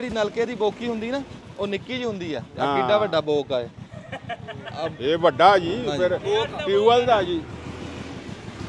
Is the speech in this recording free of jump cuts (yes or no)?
yes